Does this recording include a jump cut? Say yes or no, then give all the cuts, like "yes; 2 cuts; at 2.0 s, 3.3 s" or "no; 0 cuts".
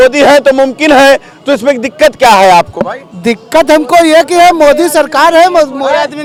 no; 0 cuts